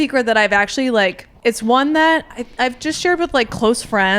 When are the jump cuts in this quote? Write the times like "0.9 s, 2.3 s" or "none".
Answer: 1.3 s, 2.4 s